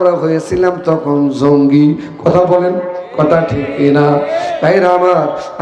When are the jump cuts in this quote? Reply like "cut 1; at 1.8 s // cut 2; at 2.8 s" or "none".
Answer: none